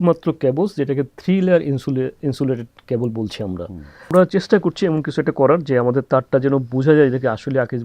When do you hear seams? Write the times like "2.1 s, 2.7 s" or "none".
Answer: 4.1 s

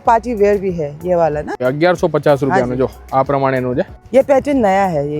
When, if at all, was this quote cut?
1.5 s, 4.0 s

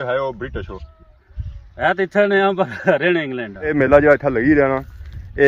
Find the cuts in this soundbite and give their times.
3.7 s

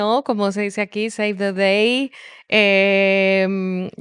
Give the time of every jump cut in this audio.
none

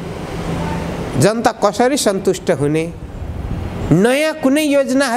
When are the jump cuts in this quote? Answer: none

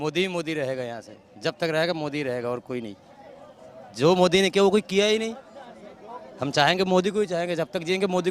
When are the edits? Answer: none

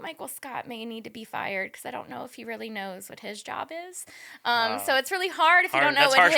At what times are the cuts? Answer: none

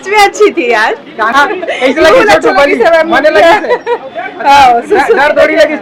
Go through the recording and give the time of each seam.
none

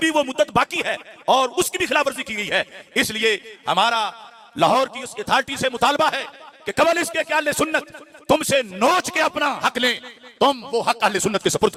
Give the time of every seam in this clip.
none

